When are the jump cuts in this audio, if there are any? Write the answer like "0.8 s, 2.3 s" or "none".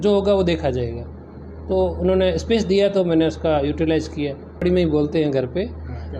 4.6 s